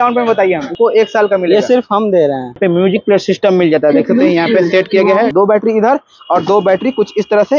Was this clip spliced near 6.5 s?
no; 3 cuts; at 0.7 s, 2.6 s, 5.3 s

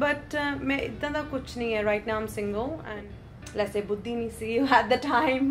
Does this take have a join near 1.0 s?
no; 1 cut; at 2.9 s

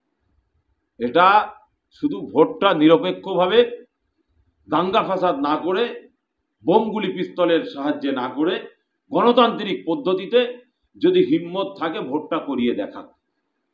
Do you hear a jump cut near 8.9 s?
no; 0 cuts

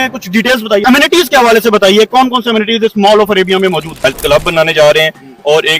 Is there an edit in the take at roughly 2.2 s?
no; 1 cut; at 3.9 s

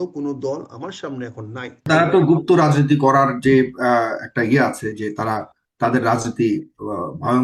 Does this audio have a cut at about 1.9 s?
yes; 1 cut; at 1.9 s

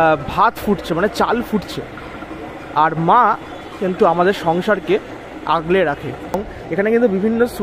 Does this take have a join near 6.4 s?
yes; 1 cut; at 6.4 s

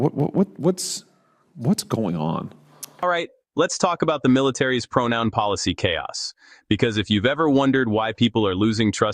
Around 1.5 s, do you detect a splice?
no; 1 cut; at 3.0 s

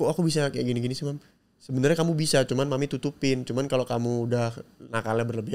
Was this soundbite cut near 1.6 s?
no; 0 cuts

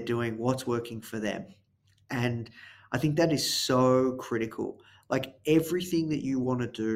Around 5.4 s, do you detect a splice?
no; 0 cuts

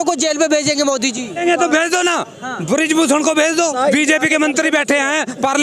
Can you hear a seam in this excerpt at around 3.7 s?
yes; 2 cuts; at 1.4 s, 3.7 s

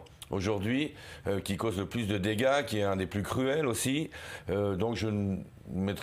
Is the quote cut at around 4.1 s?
yes; 1 cut; at 4.1 s

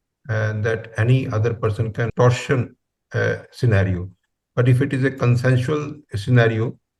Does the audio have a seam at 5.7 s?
no; 1 cut; at 2.1 s

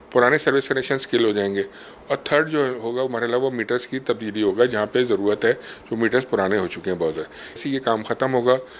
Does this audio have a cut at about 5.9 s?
no; 1 cut; at 7.6 s

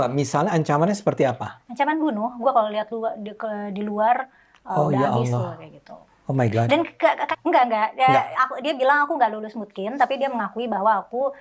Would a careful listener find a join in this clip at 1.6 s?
no; 1 cut; at 7.2 s

